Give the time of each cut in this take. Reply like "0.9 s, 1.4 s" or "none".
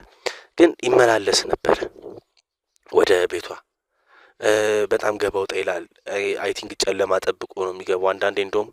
none